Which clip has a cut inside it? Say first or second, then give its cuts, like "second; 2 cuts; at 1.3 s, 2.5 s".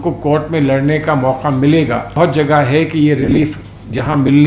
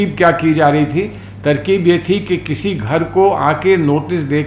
first; 1 cut; at 2.1 s